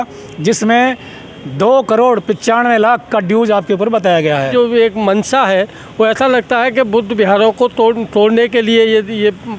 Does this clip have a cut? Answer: yes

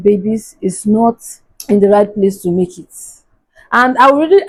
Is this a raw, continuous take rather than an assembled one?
yes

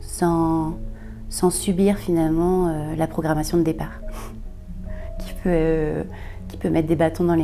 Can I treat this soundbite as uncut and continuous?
yes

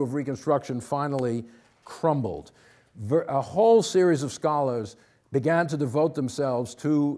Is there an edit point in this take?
yes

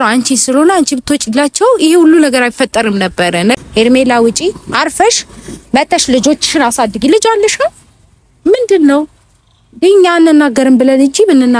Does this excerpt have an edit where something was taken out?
yes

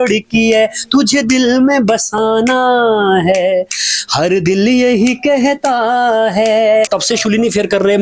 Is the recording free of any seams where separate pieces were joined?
no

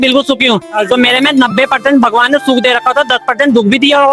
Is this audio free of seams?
yes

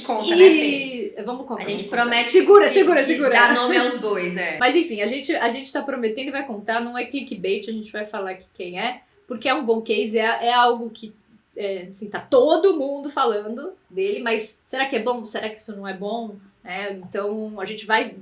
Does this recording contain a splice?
no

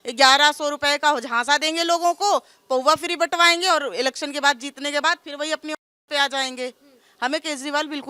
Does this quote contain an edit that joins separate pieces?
no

